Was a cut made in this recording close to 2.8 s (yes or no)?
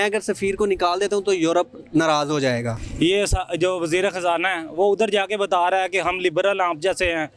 yes